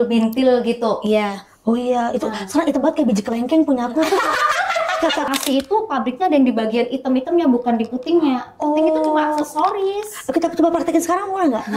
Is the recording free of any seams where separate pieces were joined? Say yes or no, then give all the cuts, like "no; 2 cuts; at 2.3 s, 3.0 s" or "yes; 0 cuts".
no; 1 cut; at 5.3 s